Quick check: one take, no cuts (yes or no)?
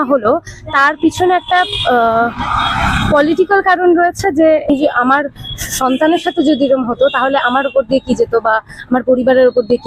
no